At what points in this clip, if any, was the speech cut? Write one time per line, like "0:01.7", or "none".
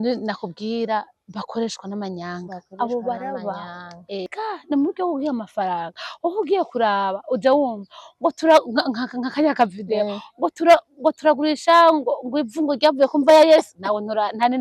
0:04.3